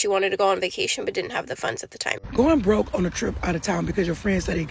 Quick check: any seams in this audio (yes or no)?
yes